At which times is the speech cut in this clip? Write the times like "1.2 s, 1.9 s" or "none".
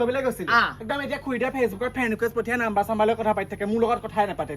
none